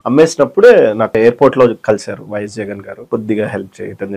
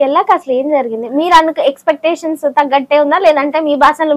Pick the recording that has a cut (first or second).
first